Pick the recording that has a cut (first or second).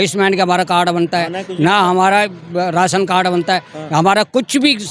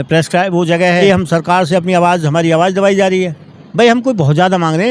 second